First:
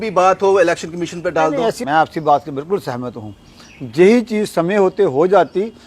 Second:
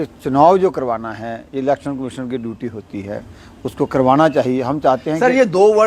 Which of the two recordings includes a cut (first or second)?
first